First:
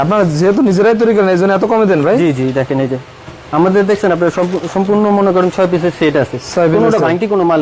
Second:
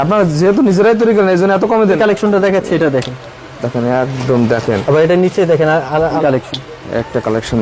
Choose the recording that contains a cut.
second; 2 cuts; at 2.0 s, 6.2 s

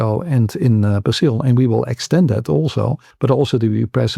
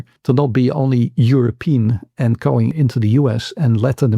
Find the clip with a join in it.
first; 1 cut; at 3.0 s

